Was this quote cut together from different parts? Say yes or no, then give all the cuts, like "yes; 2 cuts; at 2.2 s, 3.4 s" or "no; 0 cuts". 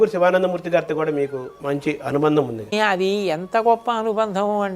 yes; 2 cuts; at 1.5 s, 2.7 s